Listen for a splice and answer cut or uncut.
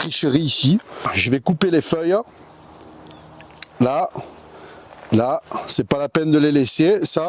cut